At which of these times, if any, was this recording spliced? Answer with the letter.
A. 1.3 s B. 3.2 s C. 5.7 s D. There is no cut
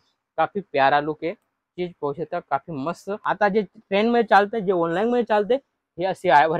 B